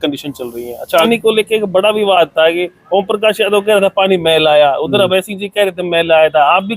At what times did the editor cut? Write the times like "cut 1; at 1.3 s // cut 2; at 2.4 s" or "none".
cut 1; at 1.1 s